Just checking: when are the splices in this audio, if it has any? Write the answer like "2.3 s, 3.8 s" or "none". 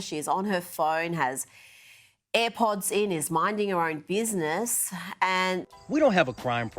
5.7 s